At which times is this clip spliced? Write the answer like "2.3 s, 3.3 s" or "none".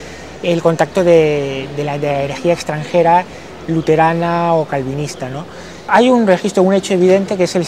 5.9 s